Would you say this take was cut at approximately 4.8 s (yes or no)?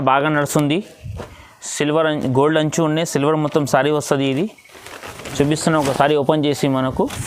no